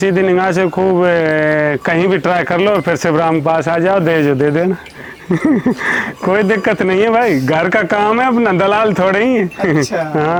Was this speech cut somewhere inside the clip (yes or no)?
no